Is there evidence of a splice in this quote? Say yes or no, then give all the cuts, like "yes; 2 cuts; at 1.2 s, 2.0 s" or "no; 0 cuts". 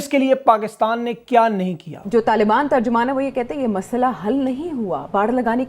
yes; 1 cut; at 1.9 s